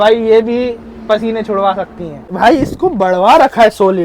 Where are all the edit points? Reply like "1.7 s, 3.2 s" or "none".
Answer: 2.2 s